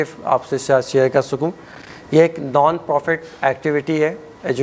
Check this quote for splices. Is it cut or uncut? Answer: uncut